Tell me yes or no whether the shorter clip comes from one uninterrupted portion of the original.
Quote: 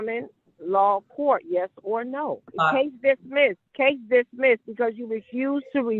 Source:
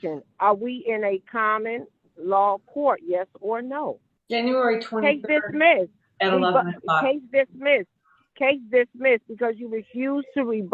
no